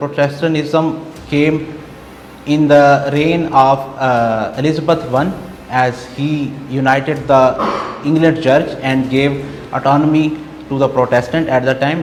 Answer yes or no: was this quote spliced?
no